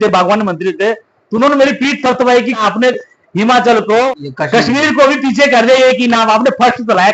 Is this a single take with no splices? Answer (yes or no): no